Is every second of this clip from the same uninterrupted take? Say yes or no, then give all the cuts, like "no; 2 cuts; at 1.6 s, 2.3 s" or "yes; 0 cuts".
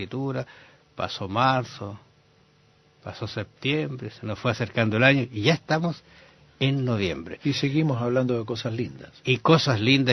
no; 1 cut; at 4.9 s